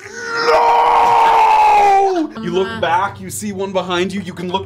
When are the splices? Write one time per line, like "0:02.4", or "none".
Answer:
0:02.4